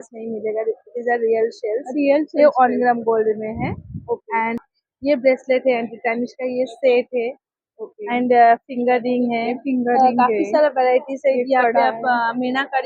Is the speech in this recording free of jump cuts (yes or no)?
yes